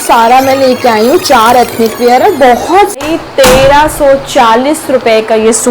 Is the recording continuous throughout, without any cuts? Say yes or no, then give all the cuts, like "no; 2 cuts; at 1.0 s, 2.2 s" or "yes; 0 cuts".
no; 1 cut; at 3.0 s